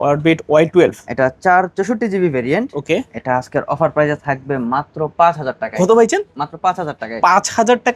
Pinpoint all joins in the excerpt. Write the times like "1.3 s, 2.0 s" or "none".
none